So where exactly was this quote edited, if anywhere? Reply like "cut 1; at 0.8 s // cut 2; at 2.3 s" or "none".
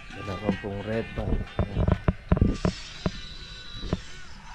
none

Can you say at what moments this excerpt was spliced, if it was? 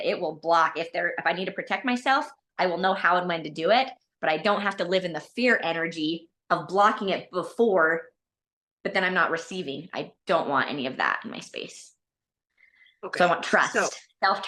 none

